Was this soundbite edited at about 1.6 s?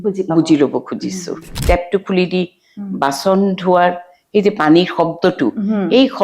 yes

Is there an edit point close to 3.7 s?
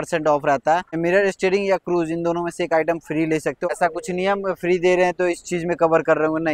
yes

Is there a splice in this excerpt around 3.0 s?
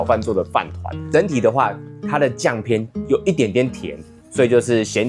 no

